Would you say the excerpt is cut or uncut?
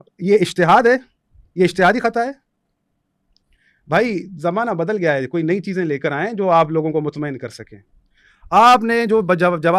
uncut